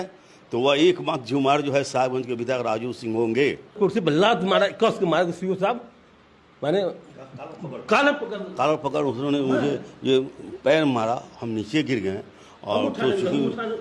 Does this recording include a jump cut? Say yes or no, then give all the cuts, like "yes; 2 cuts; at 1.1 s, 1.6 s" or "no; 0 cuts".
yes; 1 cut; at 3.8 s